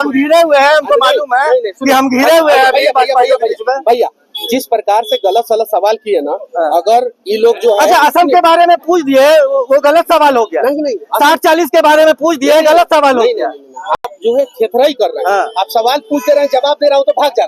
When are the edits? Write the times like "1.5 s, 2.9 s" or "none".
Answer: none